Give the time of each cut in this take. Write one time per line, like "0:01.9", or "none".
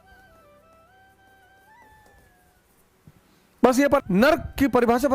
0:04.0